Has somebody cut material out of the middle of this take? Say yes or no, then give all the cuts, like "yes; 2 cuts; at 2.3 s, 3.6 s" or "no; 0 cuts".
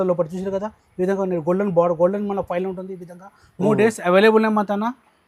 no; 0 cuts